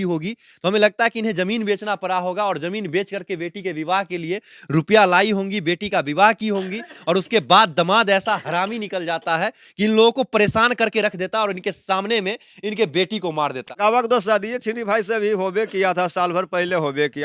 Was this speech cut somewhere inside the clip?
yes; 1 cut; at 13.6 s

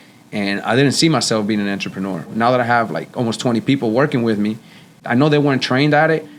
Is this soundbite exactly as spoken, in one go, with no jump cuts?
no; 2 cuts; at 2.3 s, 5.0 s

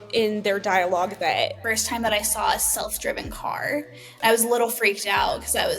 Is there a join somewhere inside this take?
yes; 1 cut; at 1.7 s

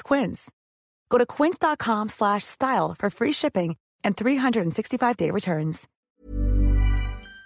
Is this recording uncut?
no; 1 cut; at 5.9 s

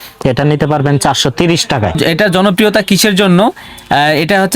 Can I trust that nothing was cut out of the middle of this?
no; 1 cut; at 2.0 s

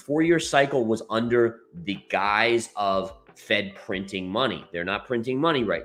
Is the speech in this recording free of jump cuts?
yes; 0 cuts

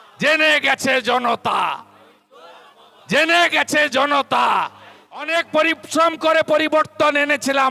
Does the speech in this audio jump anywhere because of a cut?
yes; 1 cut; at 5.3 s

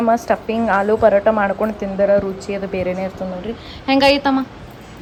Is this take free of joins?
yes; 0 cuts

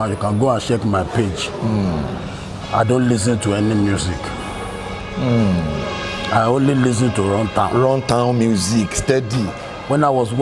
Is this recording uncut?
yes; 0 cuts

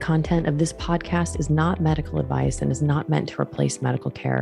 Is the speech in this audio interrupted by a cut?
no; 0 cuts

